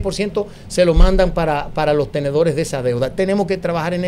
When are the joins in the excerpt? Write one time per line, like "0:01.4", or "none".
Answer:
none